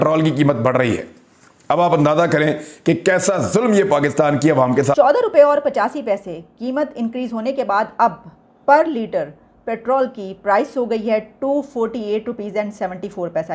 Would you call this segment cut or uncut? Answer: cut